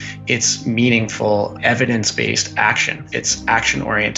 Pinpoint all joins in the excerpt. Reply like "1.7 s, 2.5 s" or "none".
1.5 s, 2.9 s